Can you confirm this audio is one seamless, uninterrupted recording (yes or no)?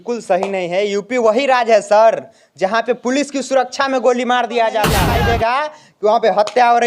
no